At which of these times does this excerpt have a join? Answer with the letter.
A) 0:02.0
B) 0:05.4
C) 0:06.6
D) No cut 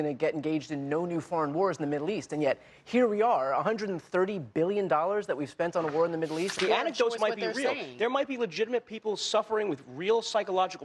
C